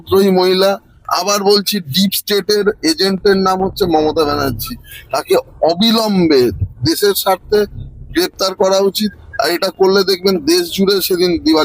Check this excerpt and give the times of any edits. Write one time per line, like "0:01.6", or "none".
none